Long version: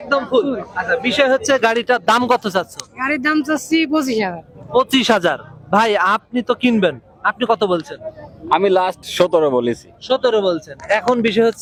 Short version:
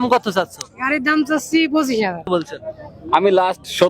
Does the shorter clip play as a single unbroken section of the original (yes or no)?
no